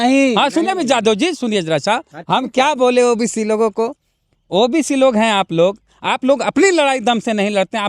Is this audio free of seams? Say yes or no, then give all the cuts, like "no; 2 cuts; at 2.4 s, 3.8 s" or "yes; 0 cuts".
no; 1 cut; at 2.1 s